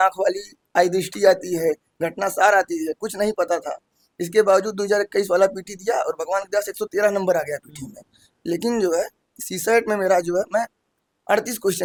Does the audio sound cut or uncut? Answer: uncut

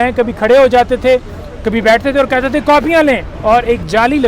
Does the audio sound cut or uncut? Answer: cut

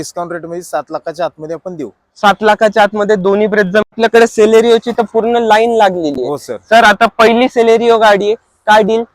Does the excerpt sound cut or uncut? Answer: cut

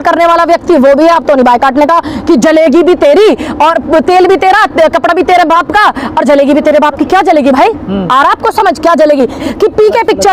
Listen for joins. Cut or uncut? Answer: cut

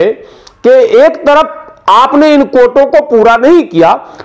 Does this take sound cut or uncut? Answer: uncut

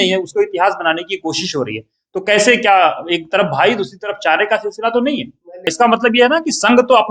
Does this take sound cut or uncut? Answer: cut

